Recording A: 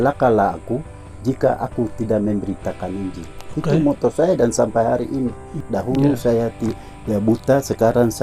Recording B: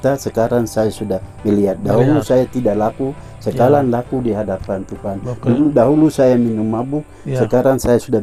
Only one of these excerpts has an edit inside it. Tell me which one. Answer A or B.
A